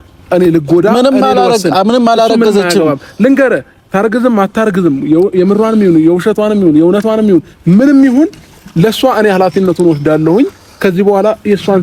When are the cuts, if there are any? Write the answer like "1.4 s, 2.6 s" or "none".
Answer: none

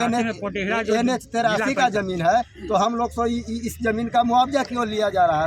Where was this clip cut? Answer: none

